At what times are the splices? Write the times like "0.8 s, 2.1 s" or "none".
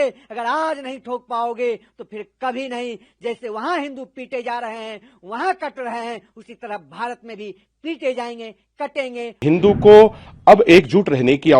9.4 s